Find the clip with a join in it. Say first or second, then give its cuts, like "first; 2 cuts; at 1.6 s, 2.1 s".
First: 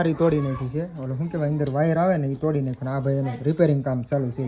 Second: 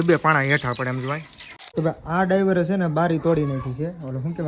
second; 1 cut; at 1.6 s